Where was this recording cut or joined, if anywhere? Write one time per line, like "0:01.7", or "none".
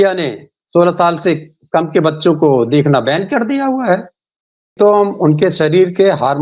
0:04.7

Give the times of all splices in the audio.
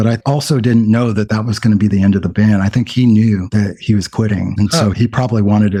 none

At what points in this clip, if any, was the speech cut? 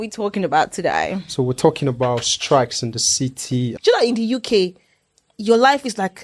0:03.7

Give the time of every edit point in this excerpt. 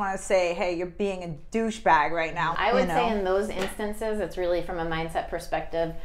0:02.5

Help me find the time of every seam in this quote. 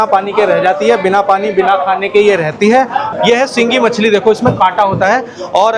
0:03.1

